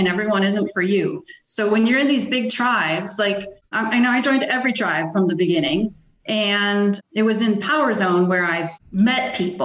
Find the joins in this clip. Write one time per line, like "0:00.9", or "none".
0:03.6
0:08.8